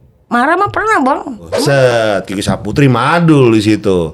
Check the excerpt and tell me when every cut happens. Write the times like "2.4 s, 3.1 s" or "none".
1.5 s